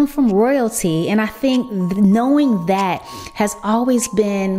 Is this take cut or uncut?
uncut